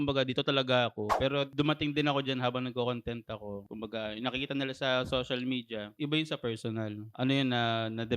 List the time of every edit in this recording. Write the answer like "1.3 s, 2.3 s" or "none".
1.1 s